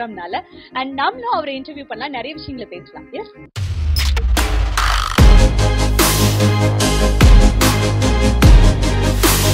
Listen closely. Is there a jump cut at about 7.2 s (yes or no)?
no